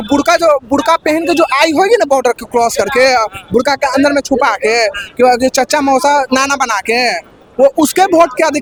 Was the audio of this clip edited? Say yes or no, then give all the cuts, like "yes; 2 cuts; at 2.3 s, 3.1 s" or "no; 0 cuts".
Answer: no; 0 cuts